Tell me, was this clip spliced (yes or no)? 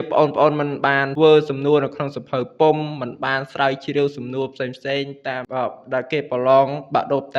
yes